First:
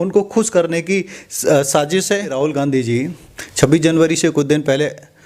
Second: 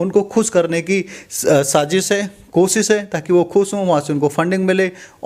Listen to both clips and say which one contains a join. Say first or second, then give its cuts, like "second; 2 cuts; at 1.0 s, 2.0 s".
first; 1 cut; at 2.3 s